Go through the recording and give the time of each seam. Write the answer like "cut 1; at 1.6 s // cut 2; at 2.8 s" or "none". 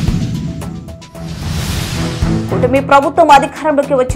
cut 1; at 2.5 s

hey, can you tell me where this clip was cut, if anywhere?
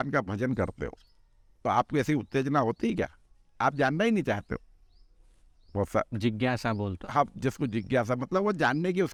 none

